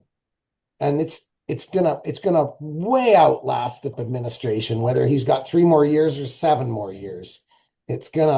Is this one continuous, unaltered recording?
no; 1 cut; at 3.9 s

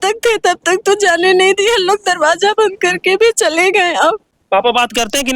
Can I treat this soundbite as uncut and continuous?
no; 1 cut; at 4.3 s

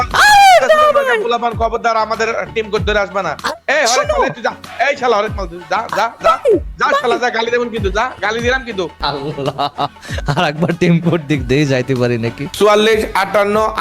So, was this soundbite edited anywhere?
yes; 2 cuts; at 9.0 s, 12.4 s

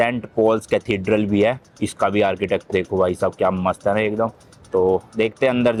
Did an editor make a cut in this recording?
no; 0 cuts

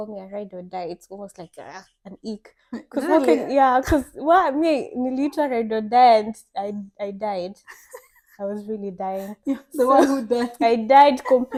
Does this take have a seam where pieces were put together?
no; 0 cuts

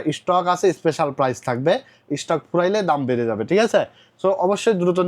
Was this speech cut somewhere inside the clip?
no; 0 cuts

